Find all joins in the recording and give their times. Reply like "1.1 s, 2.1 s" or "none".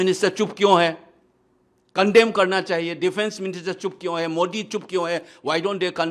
none